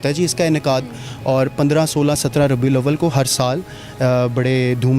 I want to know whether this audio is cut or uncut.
uncut